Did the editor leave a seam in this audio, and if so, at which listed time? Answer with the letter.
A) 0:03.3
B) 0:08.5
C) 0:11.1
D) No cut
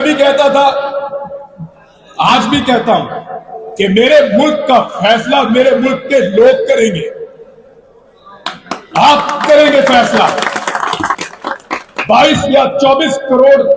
C